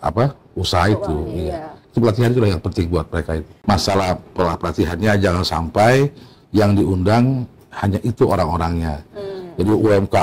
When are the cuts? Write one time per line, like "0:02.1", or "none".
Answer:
0:03.5